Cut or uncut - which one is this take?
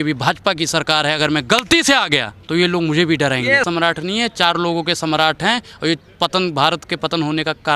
cut